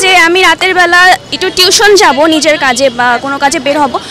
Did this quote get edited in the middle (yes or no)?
no